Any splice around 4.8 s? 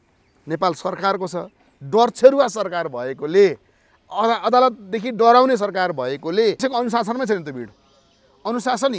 no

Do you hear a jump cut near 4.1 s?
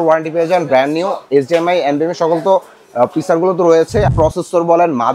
yes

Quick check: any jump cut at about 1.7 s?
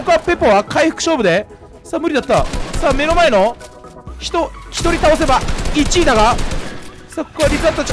no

